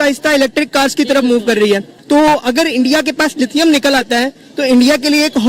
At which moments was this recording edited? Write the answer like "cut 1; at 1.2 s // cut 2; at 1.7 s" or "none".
cut 1; at 1.9 s